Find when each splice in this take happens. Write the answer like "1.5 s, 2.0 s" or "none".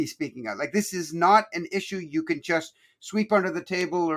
none

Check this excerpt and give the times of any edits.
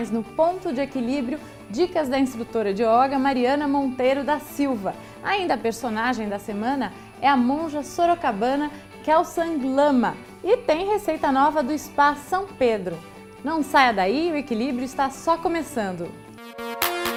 none

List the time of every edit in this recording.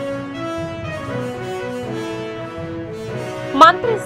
none

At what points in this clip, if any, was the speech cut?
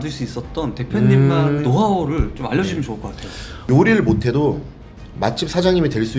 none

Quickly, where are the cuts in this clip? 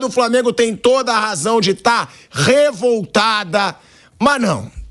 none

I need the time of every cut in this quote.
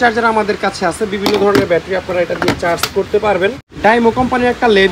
3.7 s

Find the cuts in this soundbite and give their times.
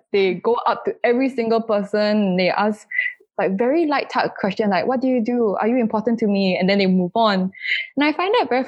none

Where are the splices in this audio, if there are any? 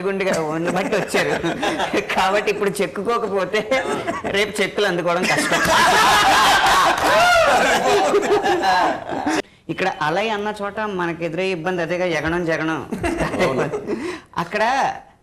9.4 s

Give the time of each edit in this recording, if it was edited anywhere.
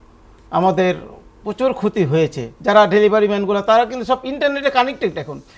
2.5 s

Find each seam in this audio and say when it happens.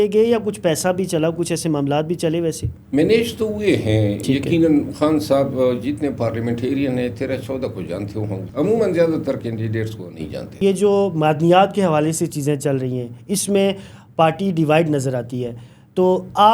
2.7 s, 8.5 s, 10.5 s

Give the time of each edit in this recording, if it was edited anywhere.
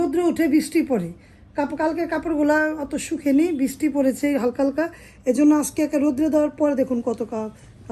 none

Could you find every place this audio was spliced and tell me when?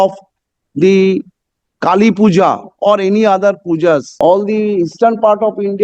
4.1 s

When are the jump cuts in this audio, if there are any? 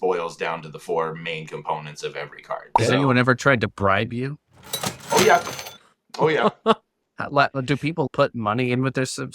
2.7 s, 8.1 s

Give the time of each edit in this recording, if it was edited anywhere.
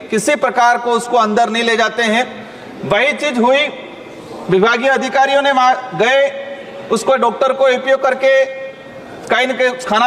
none

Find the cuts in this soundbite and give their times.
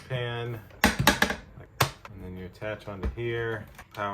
1.6 s

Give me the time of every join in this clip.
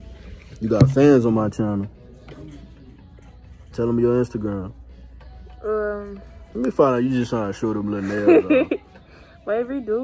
8.9 s

